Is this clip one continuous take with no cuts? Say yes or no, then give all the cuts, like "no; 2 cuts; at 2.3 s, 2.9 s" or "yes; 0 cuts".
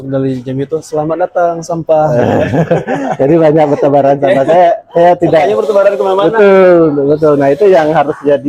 yes; 0 cuts